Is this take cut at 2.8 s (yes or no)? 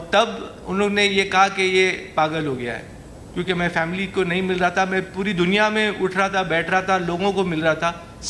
no